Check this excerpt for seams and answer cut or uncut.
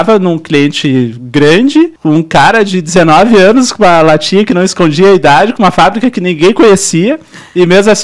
cut